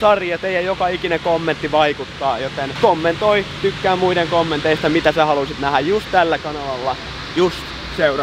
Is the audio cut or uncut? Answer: cut